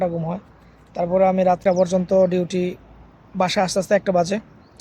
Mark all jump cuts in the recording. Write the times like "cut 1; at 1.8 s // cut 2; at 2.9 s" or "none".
cut 1; at 1.6 s

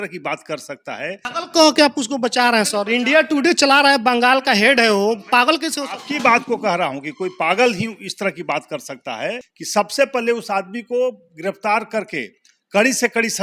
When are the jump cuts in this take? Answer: cut 1; at 1.3 s // cut 2; at 9.5 s

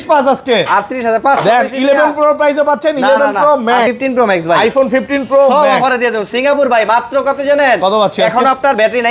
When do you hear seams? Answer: cut 1; at 3.9 s

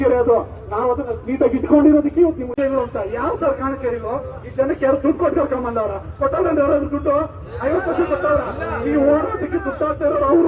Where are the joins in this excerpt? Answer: cut 1; at 2.5 s

